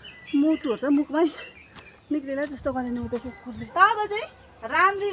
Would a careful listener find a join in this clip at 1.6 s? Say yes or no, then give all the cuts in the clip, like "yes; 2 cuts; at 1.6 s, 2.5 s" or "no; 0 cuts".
no; 1 cut; at 3.5 s